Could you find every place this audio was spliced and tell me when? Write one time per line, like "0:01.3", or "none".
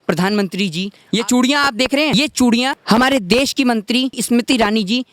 0:00.9
0:02.1
0:02.8
0:04.2